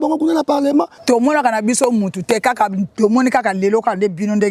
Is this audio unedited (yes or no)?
no